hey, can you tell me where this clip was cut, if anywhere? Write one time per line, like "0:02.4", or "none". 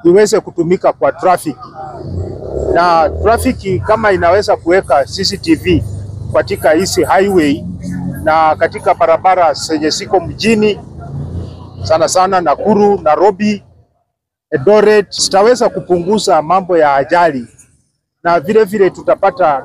0:15.2

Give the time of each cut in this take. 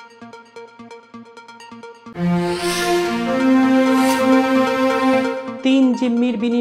none

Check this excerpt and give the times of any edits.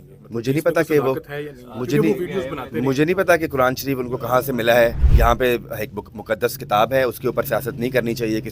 0:05.0

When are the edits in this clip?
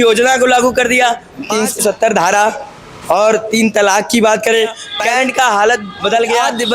0:04.9

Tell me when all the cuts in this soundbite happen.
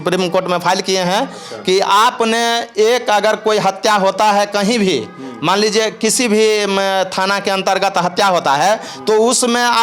none

